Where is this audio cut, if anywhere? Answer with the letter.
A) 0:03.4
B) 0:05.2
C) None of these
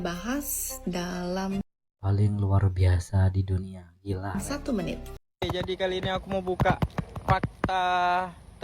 B